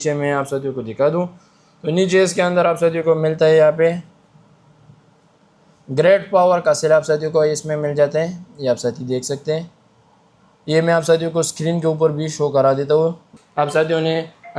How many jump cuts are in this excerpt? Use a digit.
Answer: 1